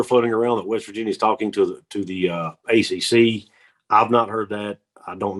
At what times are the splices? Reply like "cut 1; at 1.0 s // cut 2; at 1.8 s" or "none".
none

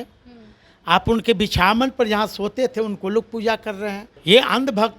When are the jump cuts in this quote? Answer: cut 1; at 4.1 s

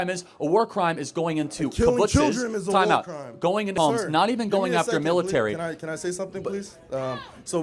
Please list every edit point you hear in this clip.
cut 1; at 3.7 s

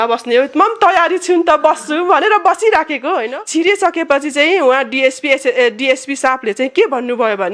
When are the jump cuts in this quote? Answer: cut 1; at 3.2 s

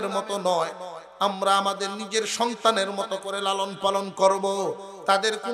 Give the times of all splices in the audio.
none

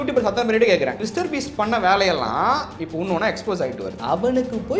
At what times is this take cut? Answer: cut 1; at 1.0 s // cut 2; at 3.9 s

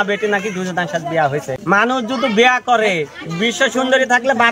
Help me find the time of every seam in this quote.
cut 1; at 1.6 s

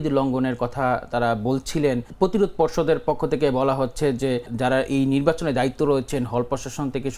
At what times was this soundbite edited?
cut 1; at 2.1 s // cut 2; at 4.5 s

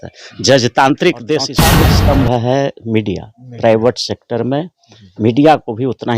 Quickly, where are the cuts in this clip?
cut 1; at 1.6 s

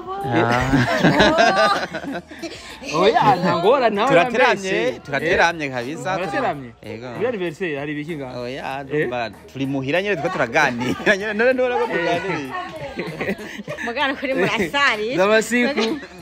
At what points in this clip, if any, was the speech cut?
cut 1; at 13.8 s

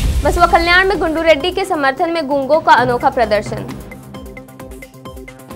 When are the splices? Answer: none

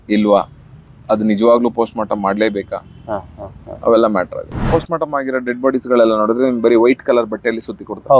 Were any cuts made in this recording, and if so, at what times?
cut 1; at 4.7 s

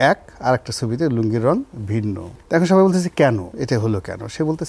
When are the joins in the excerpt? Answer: cut 1; at 2.3 s // cut 2; at 3.5 s

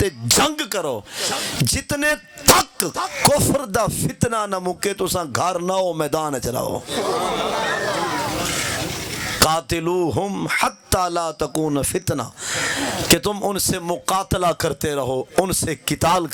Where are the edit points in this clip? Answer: none

